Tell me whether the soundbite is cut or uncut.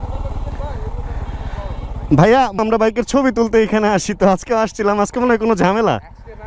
uncut